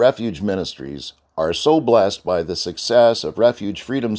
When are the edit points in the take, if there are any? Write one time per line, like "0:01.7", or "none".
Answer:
none